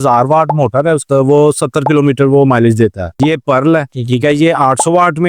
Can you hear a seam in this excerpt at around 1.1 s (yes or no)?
yes